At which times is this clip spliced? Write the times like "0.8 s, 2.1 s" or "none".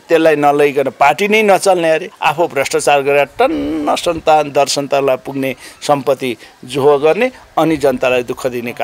2.1 s